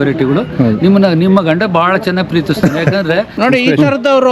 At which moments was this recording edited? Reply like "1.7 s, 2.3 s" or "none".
3.3 s